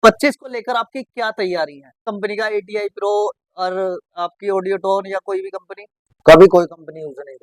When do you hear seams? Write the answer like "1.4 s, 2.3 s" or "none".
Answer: 2.0 s

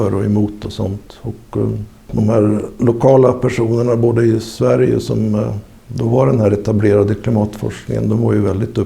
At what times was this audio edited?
2.1 s

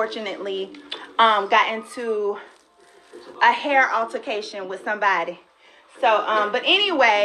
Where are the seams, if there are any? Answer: none

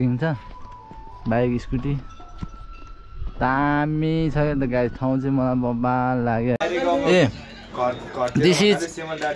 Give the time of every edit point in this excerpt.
6.6 s

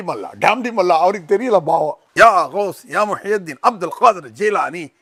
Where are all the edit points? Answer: none

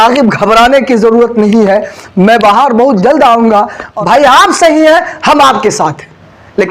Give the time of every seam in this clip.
3.9 s

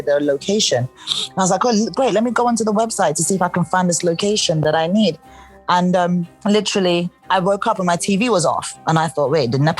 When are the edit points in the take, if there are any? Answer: 6.3 s, 7.2 s

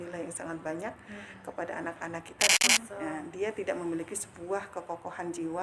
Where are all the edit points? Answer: 2.5 s

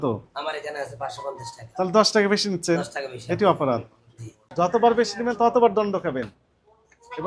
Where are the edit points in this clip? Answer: 4.4 s

